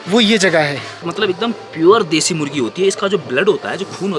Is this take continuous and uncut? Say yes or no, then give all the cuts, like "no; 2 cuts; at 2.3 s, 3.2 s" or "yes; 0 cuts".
no; 1 cut; at 1.0 s